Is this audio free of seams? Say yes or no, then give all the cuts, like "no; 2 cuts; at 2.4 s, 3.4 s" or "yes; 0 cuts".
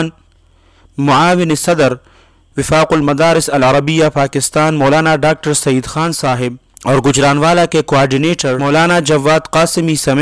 no; 2 cuts; at 6.7 s, 8.6 s